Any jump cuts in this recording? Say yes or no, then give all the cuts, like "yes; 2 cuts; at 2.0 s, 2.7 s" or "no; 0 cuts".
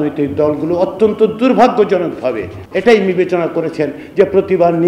yes; 1 cut; at 2.5 s